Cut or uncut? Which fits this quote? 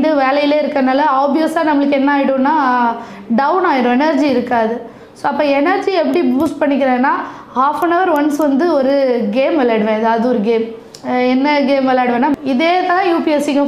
cut